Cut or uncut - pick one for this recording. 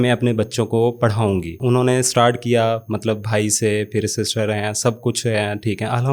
uncut